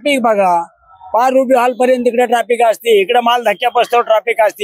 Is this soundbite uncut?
yes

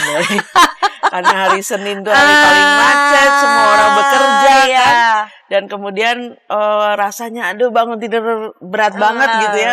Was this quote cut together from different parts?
no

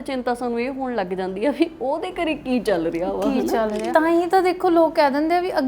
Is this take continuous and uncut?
no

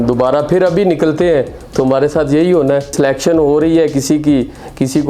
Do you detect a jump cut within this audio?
yes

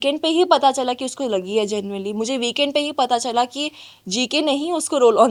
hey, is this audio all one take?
yes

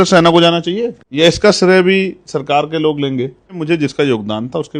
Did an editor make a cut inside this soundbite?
yes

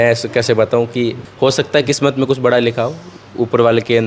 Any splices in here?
yes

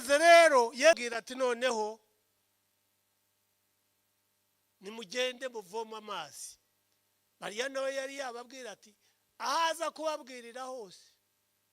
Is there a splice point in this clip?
yes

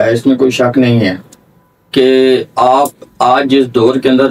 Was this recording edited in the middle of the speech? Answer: no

